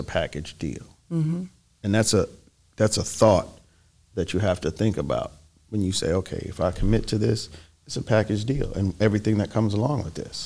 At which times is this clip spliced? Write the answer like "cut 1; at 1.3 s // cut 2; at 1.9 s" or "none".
none